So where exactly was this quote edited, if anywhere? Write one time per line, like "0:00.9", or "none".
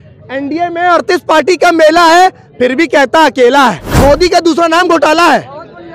0:03.9